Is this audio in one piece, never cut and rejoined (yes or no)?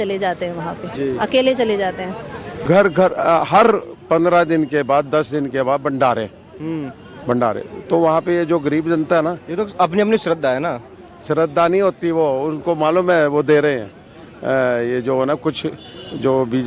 no